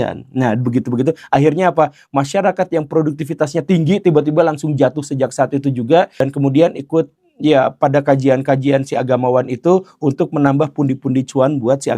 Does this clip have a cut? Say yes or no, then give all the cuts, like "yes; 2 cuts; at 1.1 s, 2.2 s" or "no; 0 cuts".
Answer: yes; 1 cut; at 6.2 s